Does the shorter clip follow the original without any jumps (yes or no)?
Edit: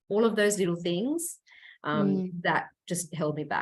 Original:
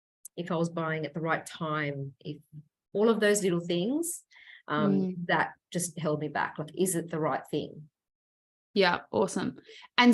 yes